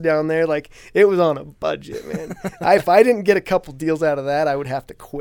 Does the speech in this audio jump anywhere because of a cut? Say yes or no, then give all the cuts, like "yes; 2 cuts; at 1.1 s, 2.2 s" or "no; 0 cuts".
no; 0 cuts